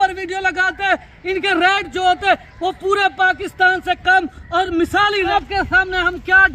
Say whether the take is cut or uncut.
cut